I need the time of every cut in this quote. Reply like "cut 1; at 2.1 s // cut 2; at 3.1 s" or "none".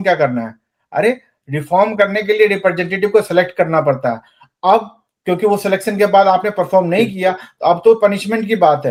none